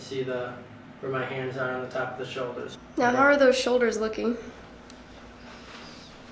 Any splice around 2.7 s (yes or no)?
yes